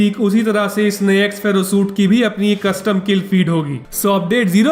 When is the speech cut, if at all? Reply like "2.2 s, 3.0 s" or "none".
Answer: 3.8 s